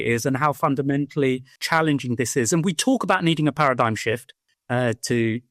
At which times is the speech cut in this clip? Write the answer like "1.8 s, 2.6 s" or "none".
none